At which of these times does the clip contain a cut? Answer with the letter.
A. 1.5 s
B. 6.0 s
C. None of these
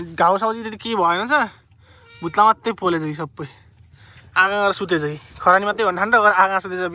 C